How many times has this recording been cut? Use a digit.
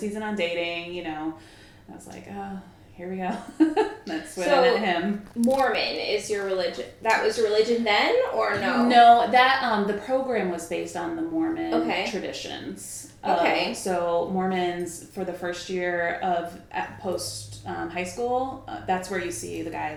0